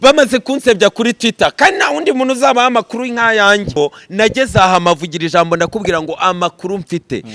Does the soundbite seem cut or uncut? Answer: cut